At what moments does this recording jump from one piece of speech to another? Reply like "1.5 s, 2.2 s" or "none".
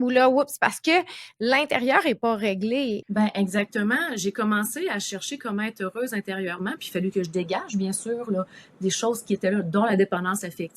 3.0 s

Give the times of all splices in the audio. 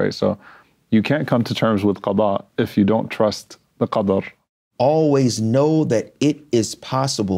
4.4 s

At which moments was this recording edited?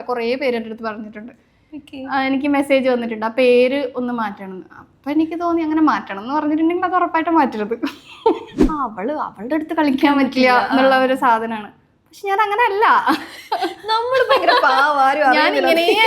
8.6 s

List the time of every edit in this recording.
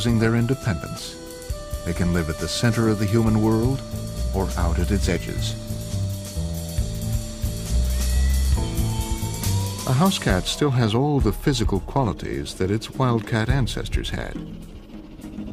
none

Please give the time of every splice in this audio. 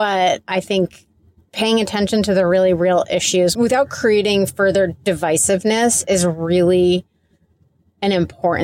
3.5 s

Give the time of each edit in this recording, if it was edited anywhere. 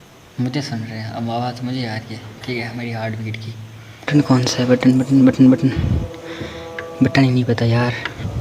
4.1 s

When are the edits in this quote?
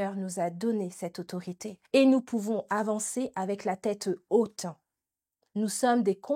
1.7 s

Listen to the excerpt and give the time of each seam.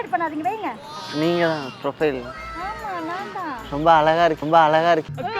0.9 s, 4.4 s

